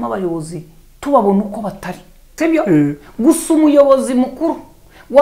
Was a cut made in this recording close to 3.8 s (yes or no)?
no